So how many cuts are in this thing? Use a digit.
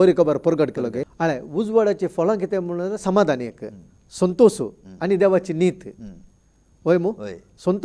1